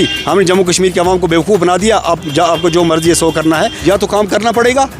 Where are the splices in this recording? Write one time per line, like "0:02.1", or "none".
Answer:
0:03.7